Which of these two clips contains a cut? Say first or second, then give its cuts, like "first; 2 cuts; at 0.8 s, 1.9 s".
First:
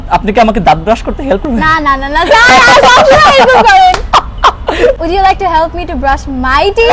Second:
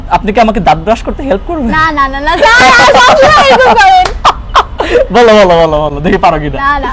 first; 2 cuts; at 1.4 s, 5.0 s